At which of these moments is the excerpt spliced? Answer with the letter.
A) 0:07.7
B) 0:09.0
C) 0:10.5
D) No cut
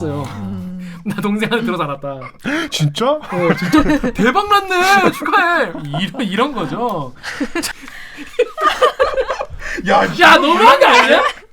A